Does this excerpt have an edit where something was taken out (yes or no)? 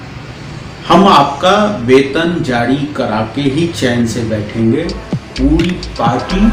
no